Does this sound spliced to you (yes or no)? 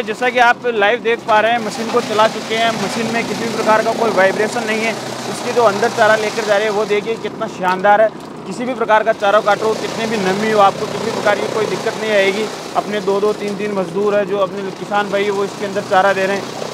no